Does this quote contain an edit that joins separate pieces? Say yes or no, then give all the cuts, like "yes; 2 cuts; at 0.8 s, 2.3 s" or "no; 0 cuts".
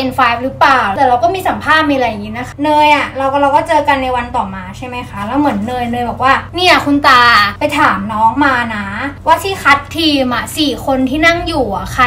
yes; 3 cuts; at 0.9 s, 2.5 s, 7.5 s